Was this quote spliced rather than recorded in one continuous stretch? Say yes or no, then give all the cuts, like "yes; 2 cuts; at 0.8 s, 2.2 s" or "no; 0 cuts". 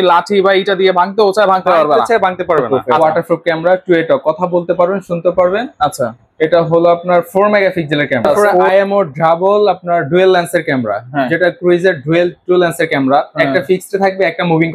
yes; 2 cuts; at 2.9 s, 8.7 s